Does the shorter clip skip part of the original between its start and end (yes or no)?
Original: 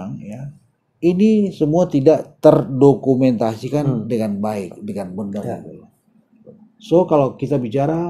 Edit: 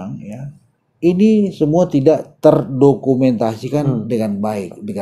no